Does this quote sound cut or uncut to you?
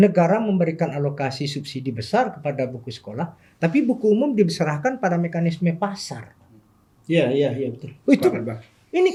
uncut